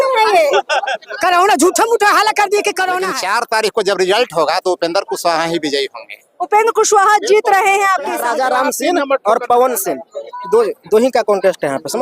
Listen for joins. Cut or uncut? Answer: cut